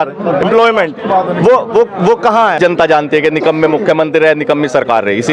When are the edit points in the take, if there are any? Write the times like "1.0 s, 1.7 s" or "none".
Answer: 2.6 s